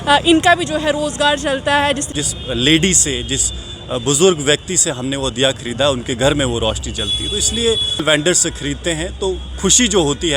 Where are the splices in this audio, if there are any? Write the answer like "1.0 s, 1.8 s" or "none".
2.1 s, 8.0 s